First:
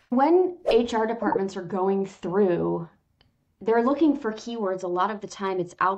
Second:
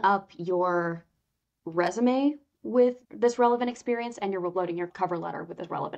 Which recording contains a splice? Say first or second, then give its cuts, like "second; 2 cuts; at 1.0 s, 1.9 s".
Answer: second; 2 cuts; at 3.0 s, 4.9 s